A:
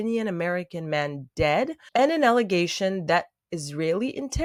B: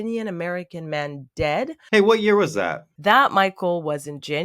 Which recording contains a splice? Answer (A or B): B